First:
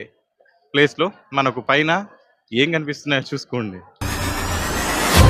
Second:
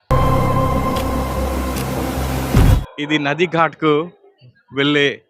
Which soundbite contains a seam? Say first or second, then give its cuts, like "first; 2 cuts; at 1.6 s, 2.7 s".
second; 1 cut; at 2.8 s